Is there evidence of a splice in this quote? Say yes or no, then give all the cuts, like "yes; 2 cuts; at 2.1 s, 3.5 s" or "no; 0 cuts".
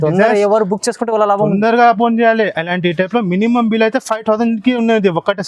no; 0 cuts